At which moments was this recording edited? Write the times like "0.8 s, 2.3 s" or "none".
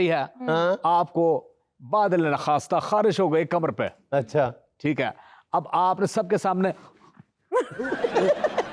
none